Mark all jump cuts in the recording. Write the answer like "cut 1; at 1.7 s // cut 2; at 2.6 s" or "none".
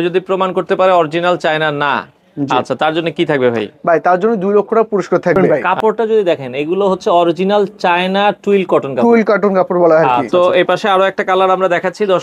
cut 1; at 5.4 s // cut 2; at 10.3 s